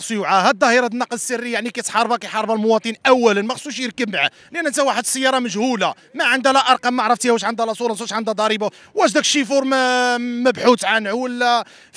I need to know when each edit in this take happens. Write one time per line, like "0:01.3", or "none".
none